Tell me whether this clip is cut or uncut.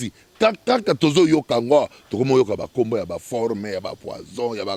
uncut